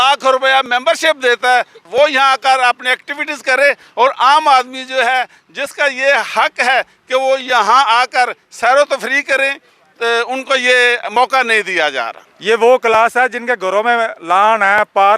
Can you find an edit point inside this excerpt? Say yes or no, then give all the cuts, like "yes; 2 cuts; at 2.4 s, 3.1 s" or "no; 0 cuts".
yes; 2 cuts; at 1.8 s, 12.3 s